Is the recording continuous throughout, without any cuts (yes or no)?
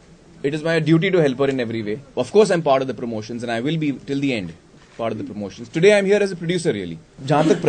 yes